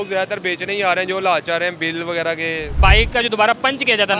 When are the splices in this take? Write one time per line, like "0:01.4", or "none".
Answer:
0:02.8